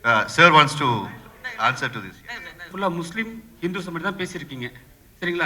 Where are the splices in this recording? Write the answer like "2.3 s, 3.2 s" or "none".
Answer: 2.7 s